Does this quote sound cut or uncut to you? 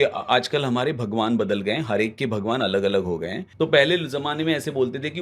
cut